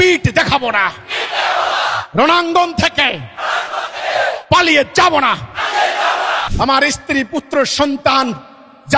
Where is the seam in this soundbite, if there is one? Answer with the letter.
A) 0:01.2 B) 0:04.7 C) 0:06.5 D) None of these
C